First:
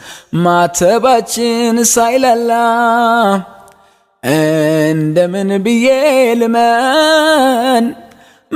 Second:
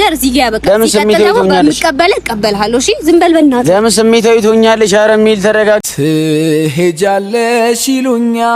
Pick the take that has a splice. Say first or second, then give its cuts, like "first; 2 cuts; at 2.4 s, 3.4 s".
second; 1 cut; at 5.9 s